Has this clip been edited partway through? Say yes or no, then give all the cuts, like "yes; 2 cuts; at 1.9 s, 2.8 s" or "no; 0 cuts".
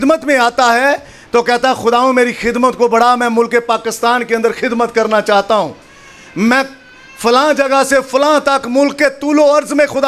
no; 0 cuts